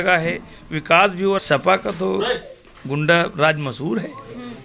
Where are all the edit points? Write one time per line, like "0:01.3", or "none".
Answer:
0:01.4